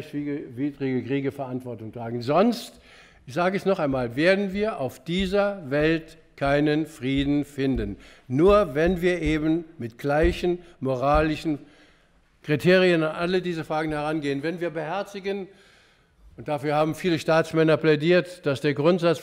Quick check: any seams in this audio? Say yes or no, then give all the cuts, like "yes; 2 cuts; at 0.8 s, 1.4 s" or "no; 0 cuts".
no; 0 cuts